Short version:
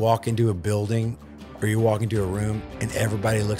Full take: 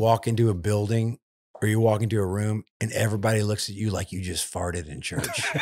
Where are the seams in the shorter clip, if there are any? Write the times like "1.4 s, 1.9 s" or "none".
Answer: none